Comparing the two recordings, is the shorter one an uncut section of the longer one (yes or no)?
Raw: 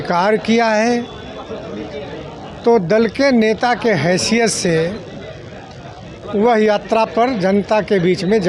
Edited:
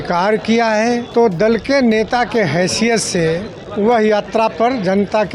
no